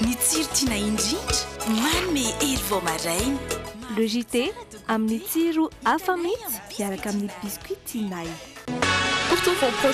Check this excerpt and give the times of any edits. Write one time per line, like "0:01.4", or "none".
none